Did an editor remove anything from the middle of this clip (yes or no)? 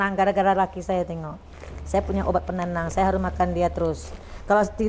no